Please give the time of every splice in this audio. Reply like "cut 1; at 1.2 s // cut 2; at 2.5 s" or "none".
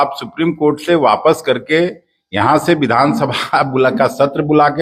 none